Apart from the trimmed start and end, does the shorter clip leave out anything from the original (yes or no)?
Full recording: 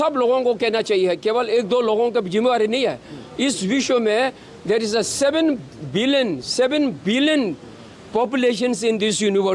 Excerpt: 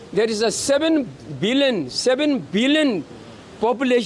no